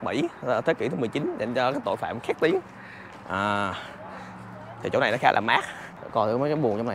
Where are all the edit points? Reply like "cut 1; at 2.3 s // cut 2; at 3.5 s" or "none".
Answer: none